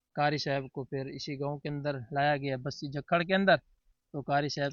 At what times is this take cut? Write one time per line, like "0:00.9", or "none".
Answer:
none